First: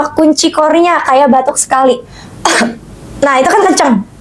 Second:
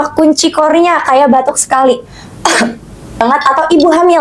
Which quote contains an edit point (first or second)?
second